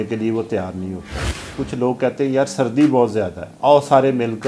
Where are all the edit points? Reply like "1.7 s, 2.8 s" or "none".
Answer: 1.5 s, 3.4 s

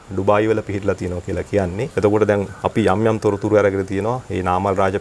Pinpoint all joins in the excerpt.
1.9 s

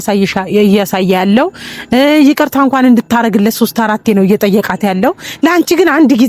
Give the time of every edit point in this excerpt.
none

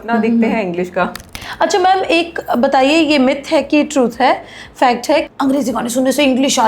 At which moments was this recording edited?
1.2 s, 5.2 s

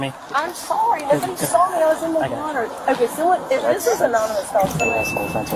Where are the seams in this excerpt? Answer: none

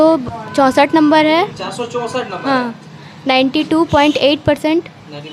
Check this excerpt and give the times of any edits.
none

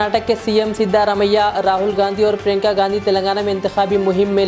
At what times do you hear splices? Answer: none

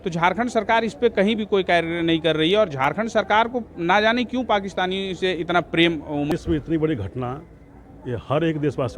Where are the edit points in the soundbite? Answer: 6.3 s

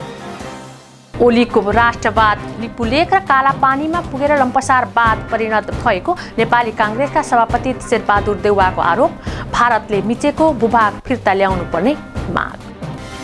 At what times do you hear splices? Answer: 0.9 s

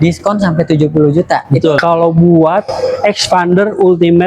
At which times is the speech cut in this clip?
1.8 s

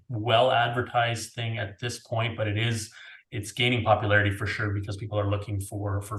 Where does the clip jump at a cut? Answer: none

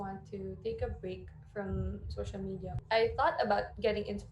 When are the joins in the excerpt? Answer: 2.7 s

